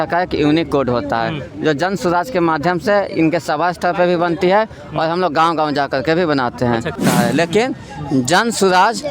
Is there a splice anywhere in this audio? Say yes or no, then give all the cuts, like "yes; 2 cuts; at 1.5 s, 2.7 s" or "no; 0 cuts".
yes; 1 cut; at 7.0 s